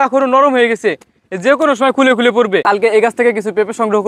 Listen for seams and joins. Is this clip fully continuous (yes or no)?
no